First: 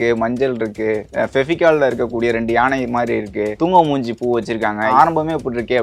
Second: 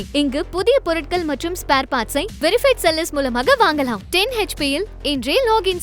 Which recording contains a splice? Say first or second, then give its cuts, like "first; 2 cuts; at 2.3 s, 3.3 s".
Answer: first; 2 cuts; at 3.5 s, 4.9 s